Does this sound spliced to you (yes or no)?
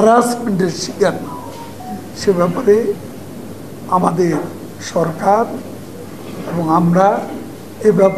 no